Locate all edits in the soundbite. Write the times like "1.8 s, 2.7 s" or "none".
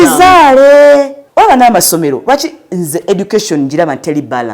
1.2 s